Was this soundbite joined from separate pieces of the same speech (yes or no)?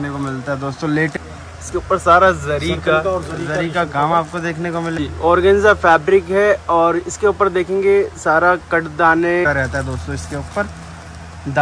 yes